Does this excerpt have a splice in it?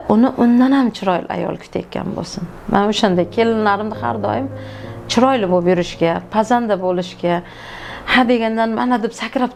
no; 0 cuts

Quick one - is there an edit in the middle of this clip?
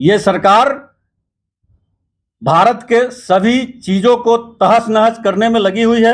no; 0 cuts

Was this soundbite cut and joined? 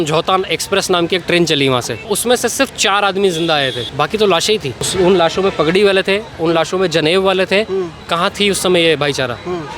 yes; 2 cuts; at 2.0 s, 4.8 s

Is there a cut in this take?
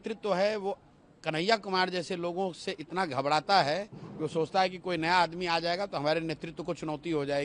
no; 0 cuts

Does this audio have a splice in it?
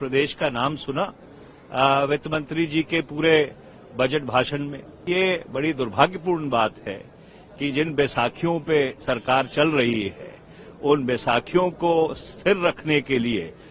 yes; 1 cut; at 5.0 s

